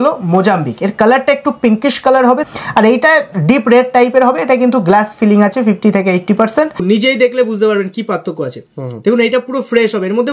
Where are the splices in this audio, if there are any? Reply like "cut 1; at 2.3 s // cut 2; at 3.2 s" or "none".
cut 1; at 2.4 s // cut 2; at 6.8 s